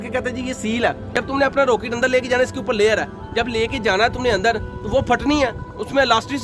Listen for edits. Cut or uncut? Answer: cut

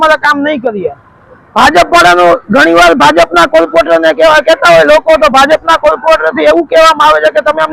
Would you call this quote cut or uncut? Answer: uncut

